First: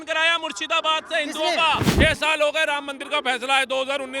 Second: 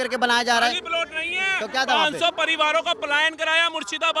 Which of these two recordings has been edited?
first; 1 cut; at 1.9 s

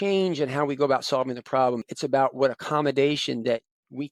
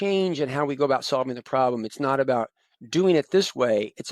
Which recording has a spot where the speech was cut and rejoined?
first; 1 cut; at 1.9 s

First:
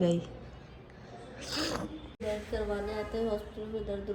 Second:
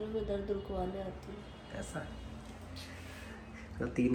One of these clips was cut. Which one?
first; 1 cut; at 2.2 s

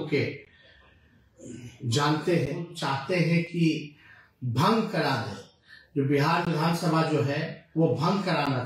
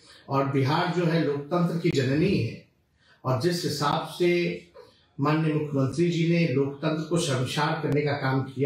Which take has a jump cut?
first; 1 cut; at 2.8 s

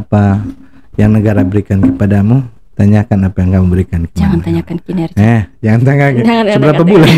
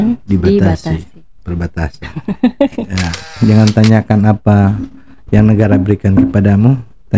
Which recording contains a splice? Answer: second; 1 cut; at 3.3 s

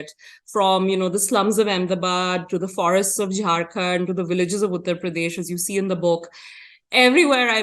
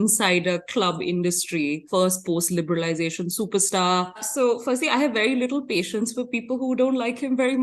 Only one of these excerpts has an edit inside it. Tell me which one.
second; 2 cuts; at 1.8 s, 4.3 s

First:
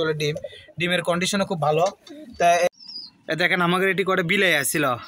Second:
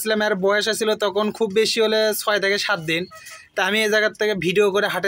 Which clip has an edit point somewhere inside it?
first; 1 cut; at 2.7 s

